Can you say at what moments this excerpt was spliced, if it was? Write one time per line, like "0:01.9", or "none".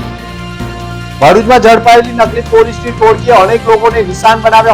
0:01.2